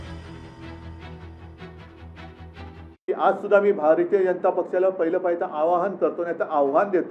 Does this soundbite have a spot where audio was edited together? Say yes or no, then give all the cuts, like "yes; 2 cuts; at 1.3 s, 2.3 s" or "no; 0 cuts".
yes; 2 cuts; at 0.9 s, 3.0 s